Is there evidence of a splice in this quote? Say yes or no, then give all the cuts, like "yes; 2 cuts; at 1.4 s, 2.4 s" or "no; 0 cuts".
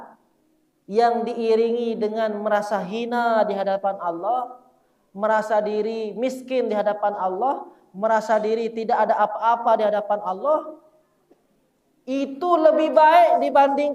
no; 0 cuts